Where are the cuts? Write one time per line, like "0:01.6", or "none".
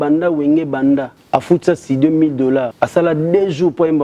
0:01.2
0:02.7

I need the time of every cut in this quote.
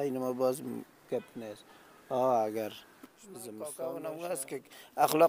0:03.6

